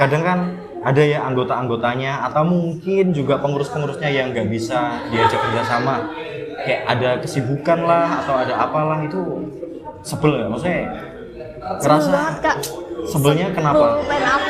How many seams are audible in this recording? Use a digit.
0